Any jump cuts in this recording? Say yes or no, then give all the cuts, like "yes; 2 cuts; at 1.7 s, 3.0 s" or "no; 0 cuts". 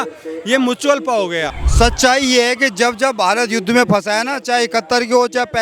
yes; 1 cut; at 1.6 s